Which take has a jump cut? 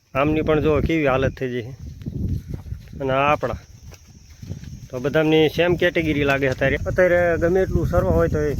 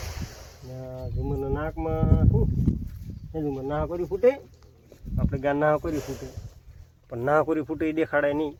first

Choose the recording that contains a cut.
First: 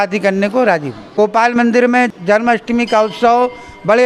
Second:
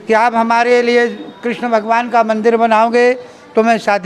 first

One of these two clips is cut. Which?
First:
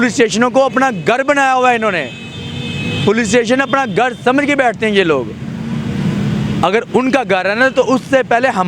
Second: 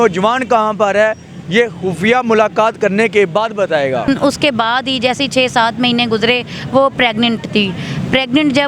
second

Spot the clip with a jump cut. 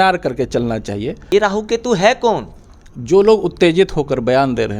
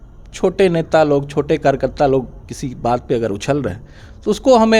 first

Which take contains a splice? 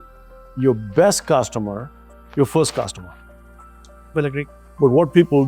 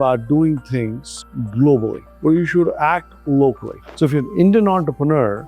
second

